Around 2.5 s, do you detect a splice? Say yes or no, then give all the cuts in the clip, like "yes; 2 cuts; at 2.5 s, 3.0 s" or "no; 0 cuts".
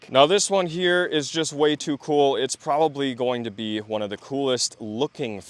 no; 0 cuts